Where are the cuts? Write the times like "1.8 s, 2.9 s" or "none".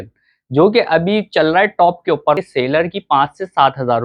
2.4 s